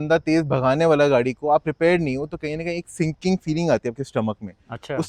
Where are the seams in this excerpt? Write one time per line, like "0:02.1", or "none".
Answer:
none